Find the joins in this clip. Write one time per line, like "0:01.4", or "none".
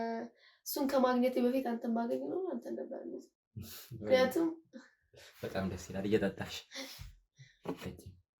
none